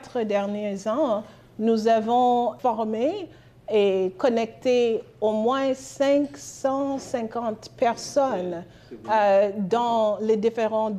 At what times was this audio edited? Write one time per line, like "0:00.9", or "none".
0:02.6